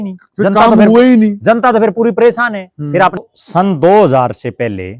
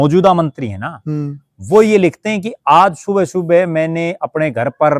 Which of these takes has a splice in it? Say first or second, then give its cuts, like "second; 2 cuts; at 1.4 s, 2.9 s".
first; 1 cut; at 3.2 s